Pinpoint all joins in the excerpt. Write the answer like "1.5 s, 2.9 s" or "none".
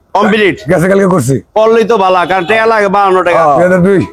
none

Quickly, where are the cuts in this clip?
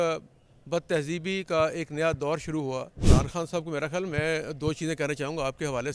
3.0 s

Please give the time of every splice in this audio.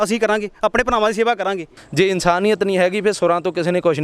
1.8 s

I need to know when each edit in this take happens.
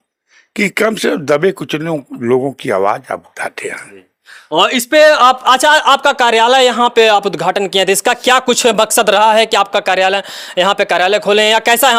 none

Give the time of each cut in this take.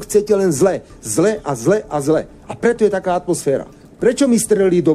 3.8 s

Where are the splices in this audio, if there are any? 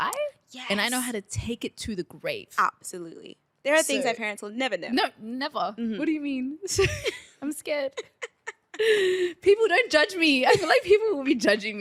none

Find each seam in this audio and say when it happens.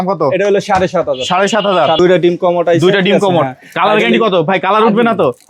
2.0 s

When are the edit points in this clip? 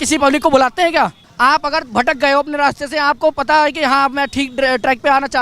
1.2 s

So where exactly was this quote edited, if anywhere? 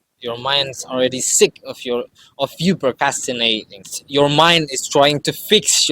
3.9 s

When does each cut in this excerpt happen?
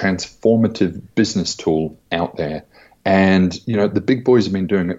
none

